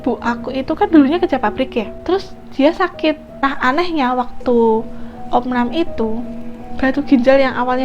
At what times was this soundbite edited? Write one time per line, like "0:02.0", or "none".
0:01.9
0:03.3